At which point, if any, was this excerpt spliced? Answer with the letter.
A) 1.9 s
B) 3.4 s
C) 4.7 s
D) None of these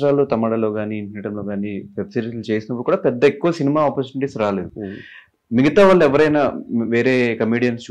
D